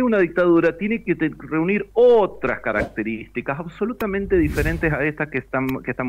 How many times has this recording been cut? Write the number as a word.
zero